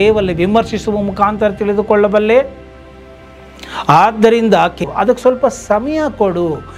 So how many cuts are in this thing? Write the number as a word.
one